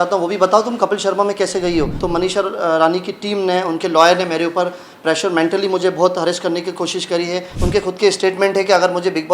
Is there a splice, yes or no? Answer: yes